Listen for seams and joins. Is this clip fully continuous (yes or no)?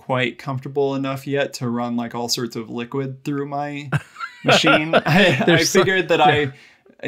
yes